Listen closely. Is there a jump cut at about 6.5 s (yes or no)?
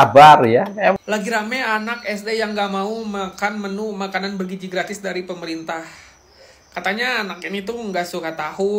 no